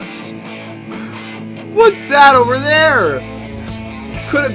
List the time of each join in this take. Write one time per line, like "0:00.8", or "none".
none